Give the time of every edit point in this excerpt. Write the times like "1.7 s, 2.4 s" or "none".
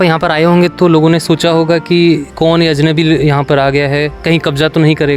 none